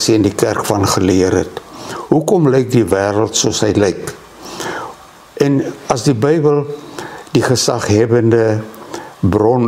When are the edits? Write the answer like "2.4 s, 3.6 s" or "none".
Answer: none